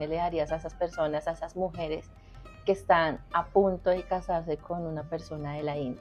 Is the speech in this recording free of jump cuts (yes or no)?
yes